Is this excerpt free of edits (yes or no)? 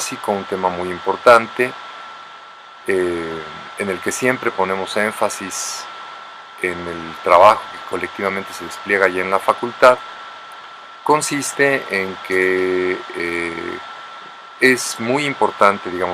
no